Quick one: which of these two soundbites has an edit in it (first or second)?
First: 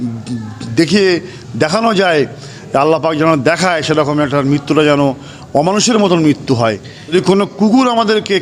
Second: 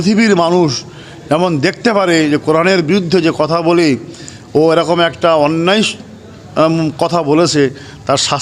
first